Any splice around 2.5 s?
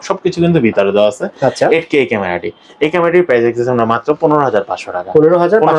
no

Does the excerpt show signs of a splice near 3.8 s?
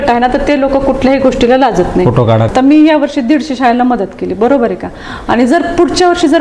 no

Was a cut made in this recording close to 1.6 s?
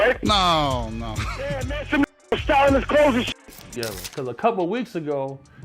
no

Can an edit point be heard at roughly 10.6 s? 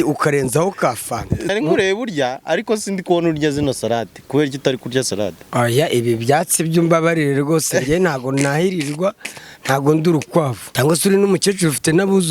yes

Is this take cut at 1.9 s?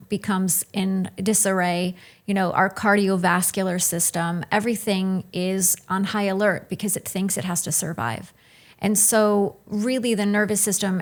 no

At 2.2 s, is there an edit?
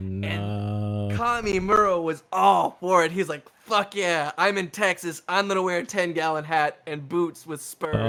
no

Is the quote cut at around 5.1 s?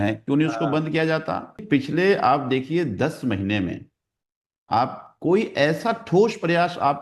no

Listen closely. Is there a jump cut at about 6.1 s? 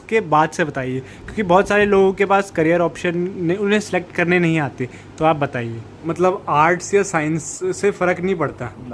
yes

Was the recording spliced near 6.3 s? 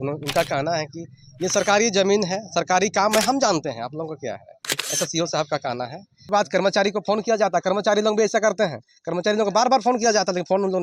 yes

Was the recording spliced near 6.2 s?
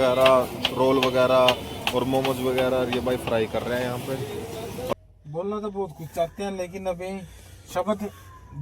no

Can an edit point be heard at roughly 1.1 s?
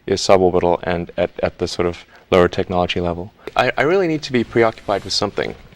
no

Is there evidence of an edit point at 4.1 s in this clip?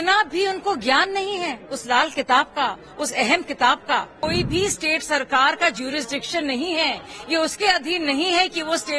yes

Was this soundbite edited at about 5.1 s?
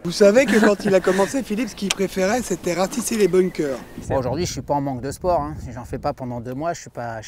no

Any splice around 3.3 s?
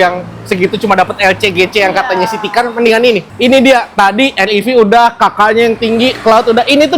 yes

